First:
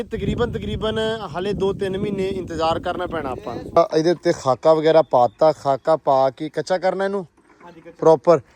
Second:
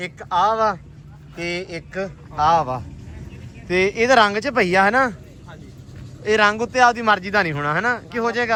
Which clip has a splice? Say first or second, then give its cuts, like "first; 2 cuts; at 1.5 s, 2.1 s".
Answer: first; 1 cut; at 3.8 s